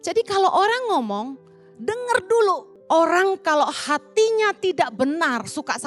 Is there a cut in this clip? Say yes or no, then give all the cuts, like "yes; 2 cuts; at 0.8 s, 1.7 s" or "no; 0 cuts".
yes; 1 cut; at 2.7 s